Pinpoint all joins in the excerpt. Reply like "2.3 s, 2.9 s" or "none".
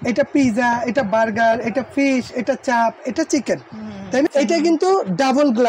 4.3 s